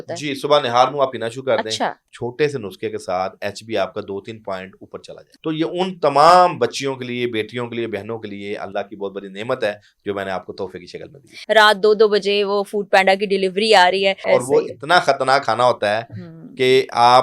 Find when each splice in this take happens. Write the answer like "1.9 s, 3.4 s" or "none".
2.1 s, 5.3 s, 11.3 s, 14.2 s

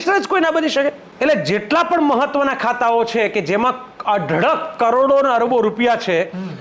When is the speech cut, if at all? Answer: 1.1 s

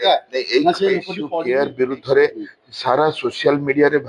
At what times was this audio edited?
1.2 s

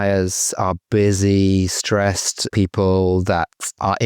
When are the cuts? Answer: 2.5 s

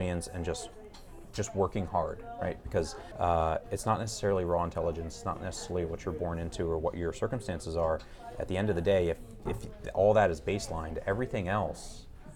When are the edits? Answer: 3.0 s

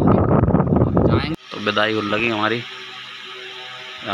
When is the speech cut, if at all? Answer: 1.4 s

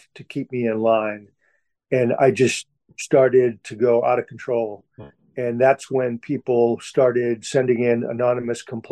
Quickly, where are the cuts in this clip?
7.4 s

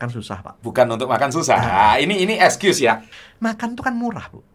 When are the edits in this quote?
3.1 s

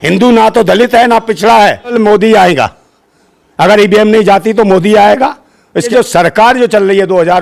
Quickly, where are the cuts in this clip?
1.9 s, 5.8 s

